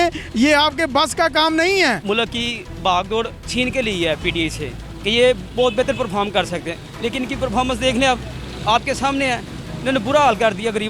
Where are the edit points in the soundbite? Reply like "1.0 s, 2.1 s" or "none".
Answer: 2.0 s